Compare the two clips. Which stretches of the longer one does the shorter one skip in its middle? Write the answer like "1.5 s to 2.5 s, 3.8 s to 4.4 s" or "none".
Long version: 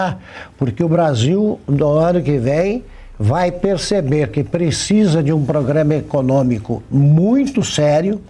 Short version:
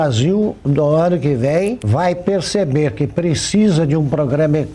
2.9 s to 3.2 s